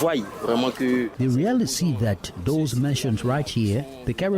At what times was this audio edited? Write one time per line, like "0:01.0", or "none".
0:01.1